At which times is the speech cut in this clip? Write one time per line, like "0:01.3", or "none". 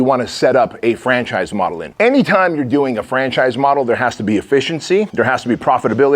0:01.8
0:05.1